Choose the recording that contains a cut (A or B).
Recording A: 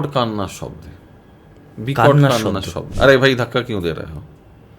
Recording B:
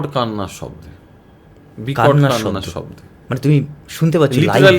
A